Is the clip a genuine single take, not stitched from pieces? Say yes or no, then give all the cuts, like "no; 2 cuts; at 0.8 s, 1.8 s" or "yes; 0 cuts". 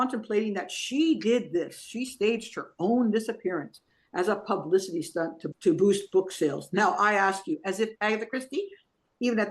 no; 1 cut; at 5.4 s